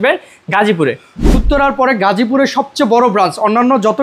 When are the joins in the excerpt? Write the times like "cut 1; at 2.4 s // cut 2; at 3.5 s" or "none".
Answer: cut 1; at 1.4 s